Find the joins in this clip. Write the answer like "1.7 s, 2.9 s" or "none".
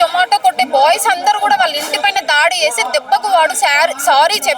none